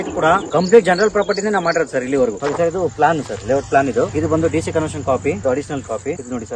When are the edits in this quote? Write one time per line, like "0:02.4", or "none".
0:04.1
0:05.4